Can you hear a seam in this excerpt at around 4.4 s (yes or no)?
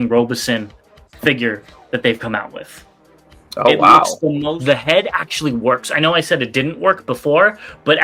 yes